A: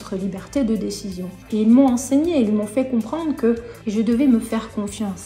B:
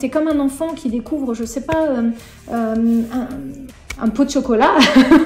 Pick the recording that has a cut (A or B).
A